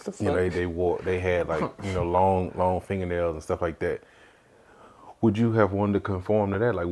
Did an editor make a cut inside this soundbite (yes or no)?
no